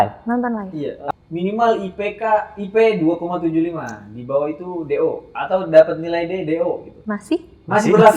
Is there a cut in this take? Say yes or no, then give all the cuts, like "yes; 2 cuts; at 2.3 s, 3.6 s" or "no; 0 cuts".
yes; 2 cuts; at 0.9 s, 6.9 s